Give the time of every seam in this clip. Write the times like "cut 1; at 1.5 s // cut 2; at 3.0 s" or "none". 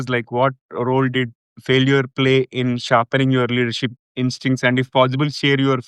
none